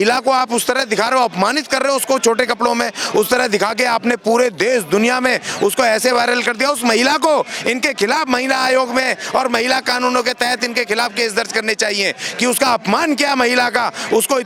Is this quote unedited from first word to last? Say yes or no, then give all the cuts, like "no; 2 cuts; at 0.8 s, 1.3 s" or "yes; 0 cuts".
yes; 0 cuts